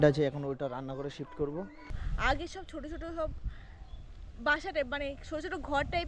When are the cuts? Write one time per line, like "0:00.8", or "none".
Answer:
0:02.0